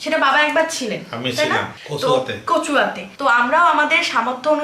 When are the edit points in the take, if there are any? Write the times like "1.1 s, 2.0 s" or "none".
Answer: 1.8 s, 3.0 s